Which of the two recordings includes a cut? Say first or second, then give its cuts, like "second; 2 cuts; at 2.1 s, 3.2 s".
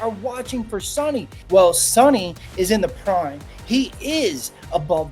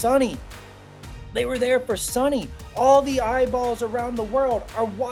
first; 1 cut; at 1.4 s